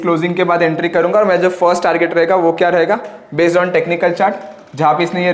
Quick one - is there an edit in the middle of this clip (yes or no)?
no